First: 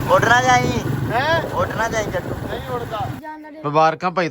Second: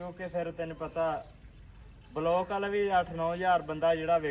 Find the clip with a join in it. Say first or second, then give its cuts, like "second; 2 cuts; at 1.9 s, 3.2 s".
first; 1 cut; at 3.2 s